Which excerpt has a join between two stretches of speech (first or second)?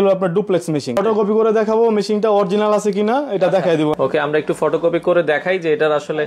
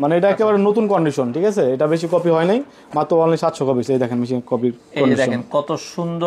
first